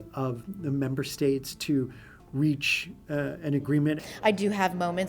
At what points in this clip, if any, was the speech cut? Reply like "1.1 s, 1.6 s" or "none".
4.0 s